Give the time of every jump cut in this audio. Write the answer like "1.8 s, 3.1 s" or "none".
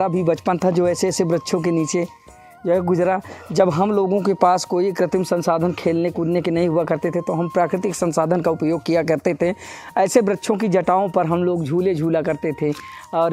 none